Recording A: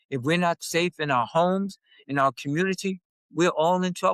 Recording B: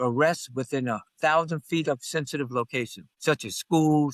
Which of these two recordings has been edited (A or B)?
B